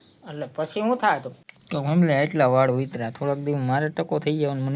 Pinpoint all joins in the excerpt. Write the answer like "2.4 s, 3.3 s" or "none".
1.4 s